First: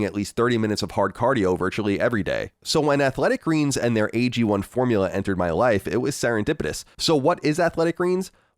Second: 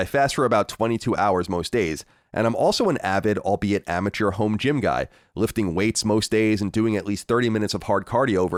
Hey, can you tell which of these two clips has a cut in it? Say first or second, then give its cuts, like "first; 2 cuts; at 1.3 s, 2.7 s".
first; 1 cut; at 6.8 s